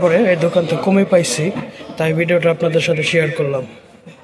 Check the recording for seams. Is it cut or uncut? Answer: uncut